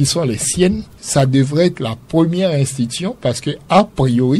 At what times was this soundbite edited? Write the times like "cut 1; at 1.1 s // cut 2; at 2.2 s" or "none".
cut 1; at 0.9 s